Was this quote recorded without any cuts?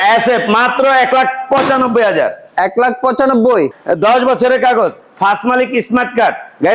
no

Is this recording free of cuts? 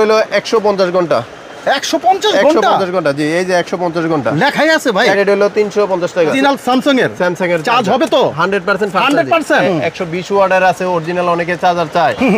no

